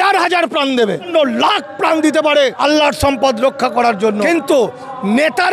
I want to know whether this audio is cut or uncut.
cut